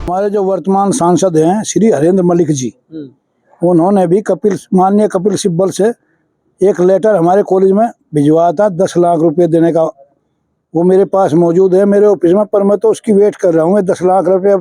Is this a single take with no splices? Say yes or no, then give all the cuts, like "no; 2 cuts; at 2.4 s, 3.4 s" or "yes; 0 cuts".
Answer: yes; 0 cuts